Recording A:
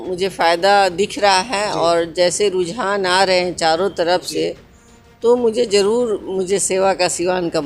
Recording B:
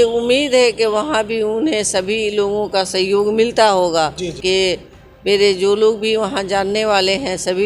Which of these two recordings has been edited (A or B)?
B